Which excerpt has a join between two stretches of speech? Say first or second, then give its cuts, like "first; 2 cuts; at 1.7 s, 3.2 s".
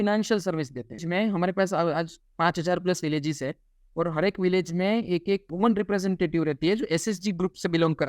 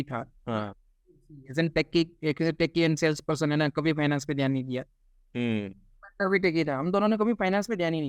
first; 1 cut; at 1.0 s